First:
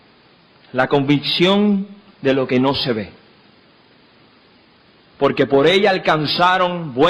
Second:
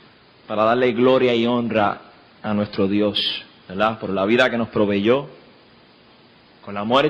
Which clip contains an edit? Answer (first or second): first